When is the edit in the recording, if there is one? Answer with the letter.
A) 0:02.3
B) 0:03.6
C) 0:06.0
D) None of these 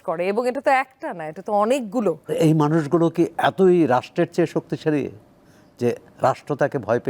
A